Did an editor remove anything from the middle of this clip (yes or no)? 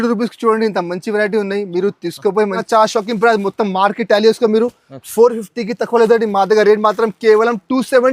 yes